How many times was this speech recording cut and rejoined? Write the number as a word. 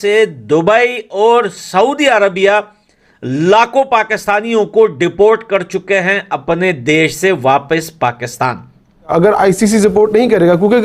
one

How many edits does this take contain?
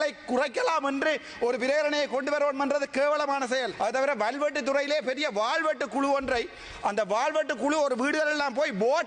one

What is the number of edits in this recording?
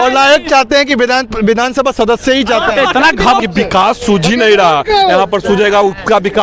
one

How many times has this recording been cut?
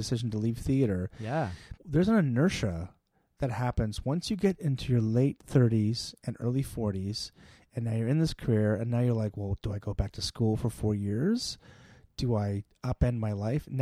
zero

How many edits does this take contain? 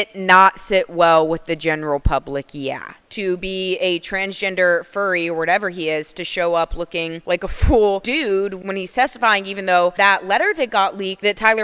one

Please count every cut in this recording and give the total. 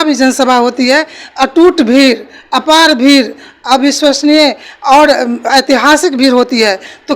zero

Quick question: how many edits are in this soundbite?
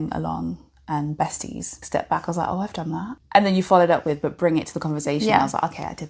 two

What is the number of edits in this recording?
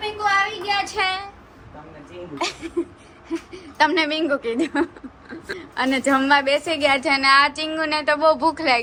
zero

